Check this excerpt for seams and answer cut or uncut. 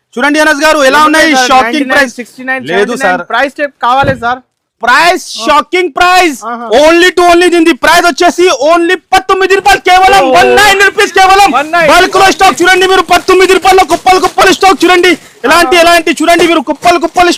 uncut